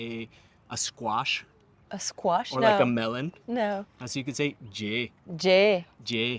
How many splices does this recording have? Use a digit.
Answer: 0